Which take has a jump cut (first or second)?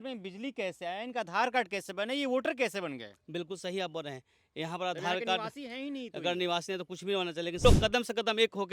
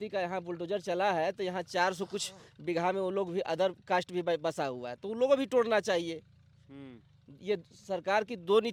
first